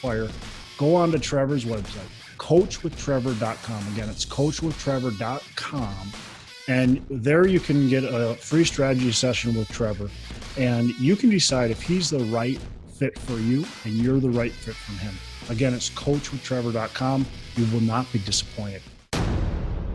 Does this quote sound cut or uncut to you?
cut